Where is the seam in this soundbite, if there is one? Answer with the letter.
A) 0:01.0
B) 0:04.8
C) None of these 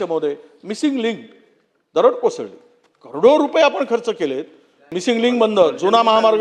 B